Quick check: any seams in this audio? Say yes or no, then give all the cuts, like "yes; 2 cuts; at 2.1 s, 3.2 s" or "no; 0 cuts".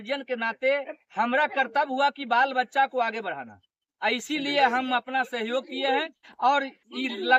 no; 0 cuts